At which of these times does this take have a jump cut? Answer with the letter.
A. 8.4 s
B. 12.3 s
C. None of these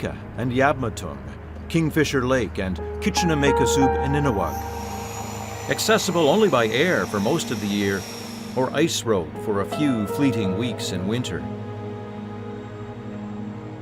A